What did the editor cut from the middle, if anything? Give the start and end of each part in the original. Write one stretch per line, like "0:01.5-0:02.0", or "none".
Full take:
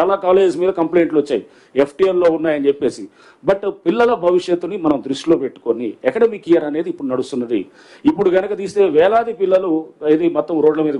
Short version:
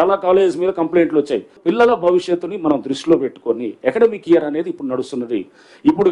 0:01.5-0:03.7